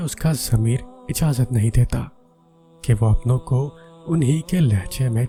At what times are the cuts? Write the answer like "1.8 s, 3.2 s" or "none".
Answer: none